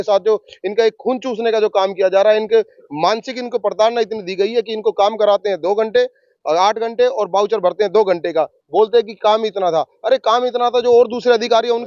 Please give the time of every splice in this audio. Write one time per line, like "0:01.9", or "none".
none